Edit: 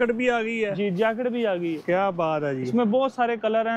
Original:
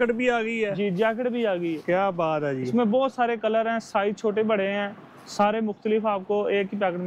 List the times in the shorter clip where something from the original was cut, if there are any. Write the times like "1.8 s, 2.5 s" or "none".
none